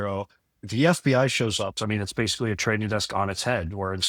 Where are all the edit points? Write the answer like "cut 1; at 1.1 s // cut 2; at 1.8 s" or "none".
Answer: cut 1; at 1.7 s